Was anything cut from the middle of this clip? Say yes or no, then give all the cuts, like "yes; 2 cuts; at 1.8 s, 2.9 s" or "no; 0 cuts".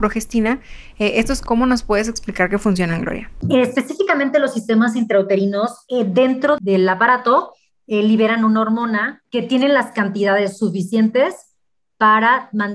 yes; 5 cuts; at 1.4 s, 3.4 s, 5.8 s, 6.6 s, 9.2 s